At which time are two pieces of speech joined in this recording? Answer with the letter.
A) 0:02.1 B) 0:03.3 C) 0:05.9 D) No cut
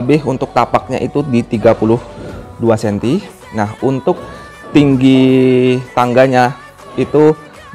D